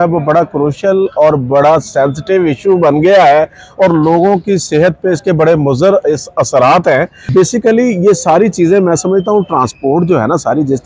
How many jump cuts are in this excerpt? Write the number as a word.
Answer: one